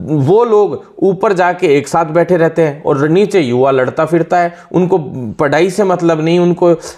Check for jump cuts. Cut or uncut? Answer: uncut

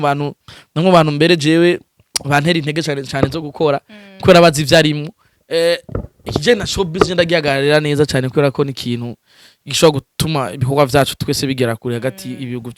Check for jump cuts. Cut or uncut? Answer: uncut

